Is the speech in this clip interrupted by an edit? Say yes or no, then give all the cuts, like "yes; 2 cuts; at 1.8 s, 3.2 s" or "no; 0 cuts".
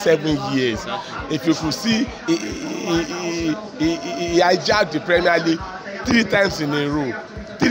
no; 0 cuts